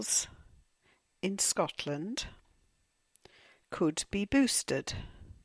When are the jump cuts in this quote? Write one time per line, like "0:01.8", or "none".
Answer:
0:01.4